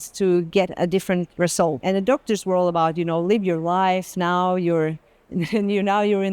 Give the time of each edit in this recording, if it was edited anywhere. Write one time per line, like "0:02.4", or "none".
0:01.8